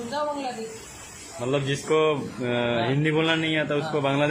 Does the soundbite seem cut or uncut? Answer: uncut